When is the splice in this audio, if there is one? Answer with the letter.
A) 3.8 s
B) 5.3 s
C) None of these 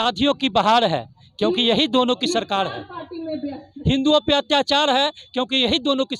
C